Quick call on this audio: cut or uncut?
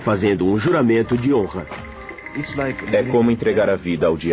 cut